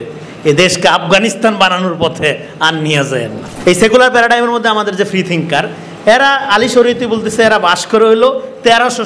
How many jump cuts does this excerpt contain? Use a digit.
1